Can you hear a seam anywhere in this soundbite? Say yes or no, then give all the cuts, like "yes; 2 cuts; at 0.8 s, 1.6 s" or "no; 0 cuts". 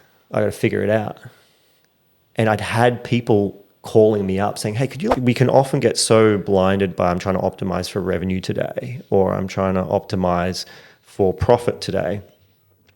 yes; 1 cut; at 5.2 s